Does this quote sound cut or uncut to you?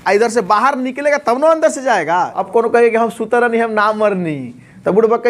cut